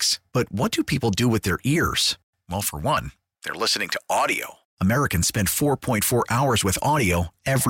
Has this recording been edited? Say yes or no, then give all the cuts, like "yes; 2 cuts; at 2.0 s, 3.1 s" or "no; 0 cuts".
no; 0 cuts